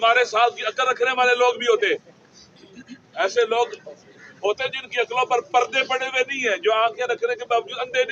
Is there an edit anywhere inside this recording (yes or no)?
no